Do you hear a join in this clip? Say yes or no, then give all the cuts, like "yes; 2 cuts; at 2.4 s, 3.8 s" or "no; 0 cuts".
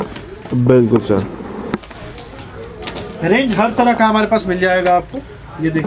no; 0 cuts